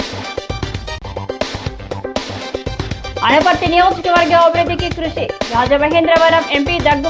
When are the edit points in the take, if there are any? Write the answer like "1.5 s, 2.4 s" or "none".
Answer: none